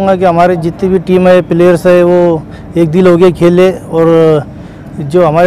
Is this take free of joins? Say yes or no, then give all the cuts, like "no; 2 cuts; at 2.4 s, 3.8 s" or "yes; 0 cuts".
yes; 0 cuts